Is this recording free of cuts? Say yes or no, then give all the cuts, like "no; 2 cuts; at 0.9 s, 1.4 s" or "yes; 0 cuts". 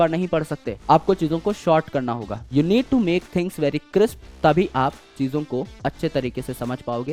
yes; 0 cuts